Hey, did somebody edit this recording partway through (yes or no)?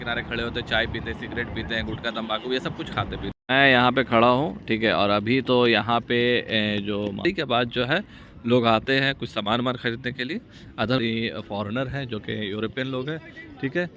yes